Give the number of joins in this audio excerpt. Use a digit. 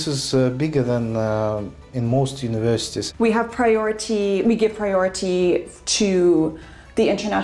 1